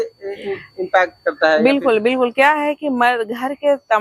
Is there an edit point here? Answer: no; 0 cuts

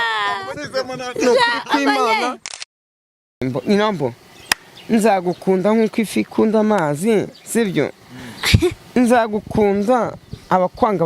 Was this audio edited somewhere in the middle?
yes; 1 cut; at 3.4 s

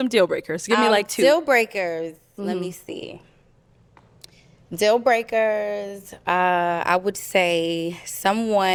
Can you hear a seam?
no; 0 cuts

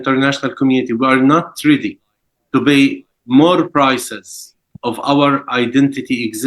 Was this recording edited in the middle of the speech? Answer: no; 0 cuts

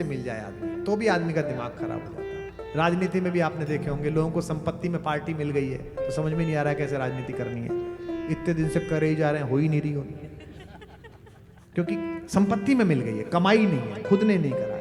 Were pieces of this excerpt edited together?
no; 0 cuts

